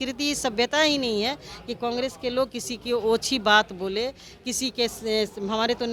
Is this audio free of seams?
yes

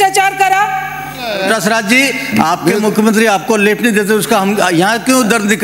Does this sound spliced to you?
yes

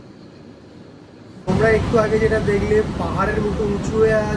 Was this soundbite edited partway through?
no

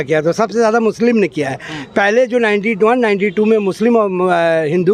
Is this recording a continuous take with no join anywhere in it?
yes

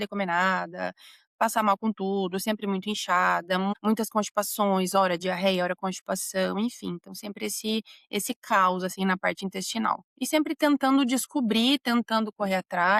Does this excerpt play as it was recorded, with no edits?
yes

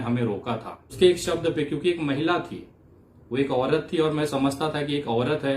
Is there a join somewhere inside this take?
yes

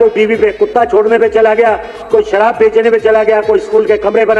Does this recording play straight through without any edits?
yes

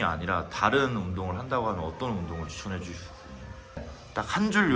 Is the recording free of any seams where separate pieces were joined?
no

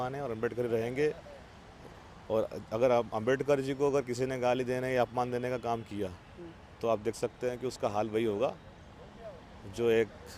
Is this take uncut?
yes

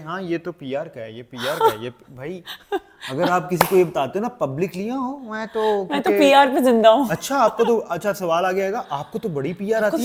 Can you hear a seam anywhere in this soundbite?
no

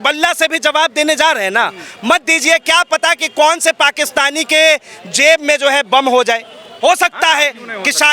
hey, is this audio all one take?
no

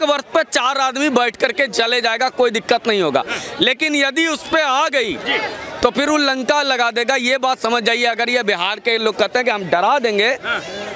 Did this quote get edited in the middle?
no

